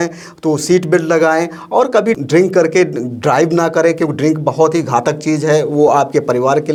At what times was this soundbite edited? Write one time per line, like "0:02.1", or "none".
none